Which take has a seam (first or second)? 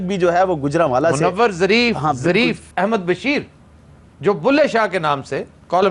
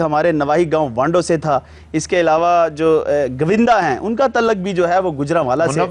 first